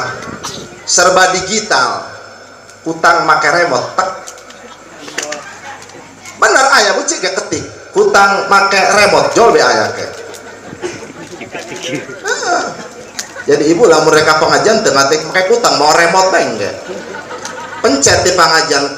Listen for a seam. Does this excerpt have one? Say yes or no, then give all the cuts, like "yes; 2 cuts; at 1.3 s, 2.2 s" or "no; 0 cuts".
no; 0 cuts